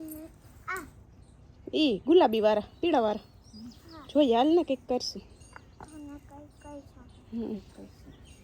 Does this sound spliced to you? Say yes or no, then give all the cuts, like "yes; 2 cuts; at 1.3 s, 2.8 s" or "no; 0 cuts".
no; 0 cuts